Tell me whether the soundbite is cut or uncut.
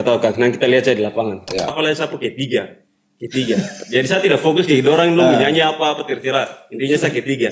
cut